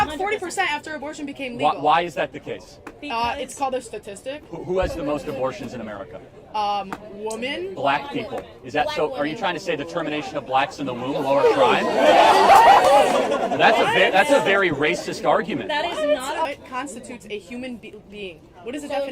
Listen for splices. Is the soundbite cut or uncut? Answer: cut